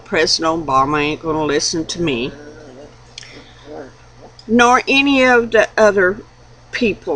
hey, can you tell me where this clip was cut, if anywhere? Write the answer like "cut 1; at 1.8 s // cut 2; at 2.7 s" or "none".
cut 1; at 2.3 s